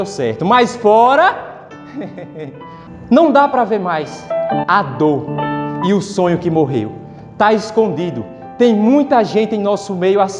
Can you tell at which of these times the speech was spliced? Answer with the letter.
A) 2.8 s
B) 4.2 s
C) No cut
A